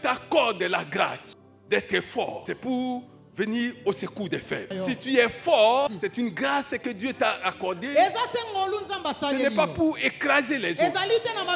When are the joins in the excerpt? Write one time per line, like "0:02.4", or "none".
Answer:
0:01.2
0:02.4
0:04.7
0:05.9